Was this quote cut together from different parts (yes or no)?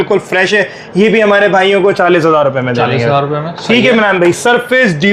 no